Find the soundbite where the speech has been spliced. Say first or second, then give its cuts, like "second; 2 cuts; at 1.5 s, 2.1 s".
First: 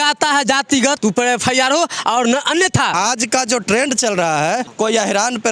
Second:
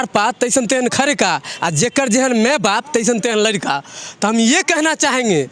first; 3 cuts; at 1.0 s, 2.9 s, 4.7 s